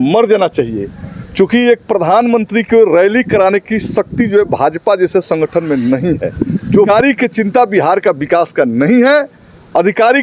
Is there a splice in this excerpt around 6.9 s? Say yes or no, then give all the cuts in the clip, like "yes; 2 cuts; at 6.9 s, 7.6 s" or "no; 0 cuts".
yes; 1 cut; at 6.9 s